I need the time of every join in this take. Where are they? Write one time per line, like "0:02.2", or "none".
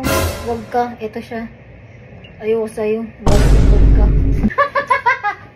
0:04.5